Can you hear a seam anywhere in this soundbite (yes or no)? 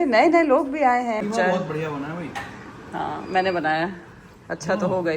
yes